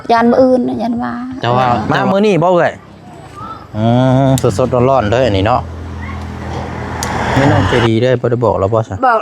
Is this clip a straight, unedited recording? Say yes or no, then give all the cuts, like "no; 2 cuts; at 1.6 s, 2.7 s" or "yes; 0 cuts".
no; 2 cuts; at 1.8 s, 7.4 s